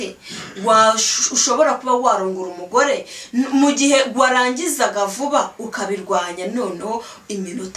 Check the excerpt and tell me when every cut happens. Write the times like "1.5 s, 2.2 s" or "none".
none